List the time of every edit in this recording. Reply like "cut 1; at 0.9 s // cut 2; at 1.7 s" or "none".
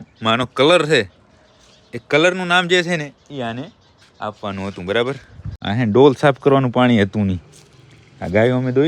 cut 1; at 5.6 s